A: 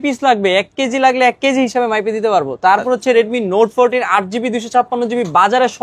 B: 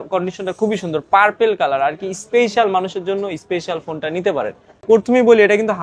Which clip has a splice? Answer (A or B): B